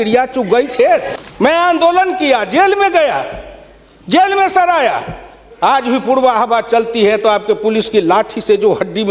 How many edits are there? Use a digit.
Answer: 0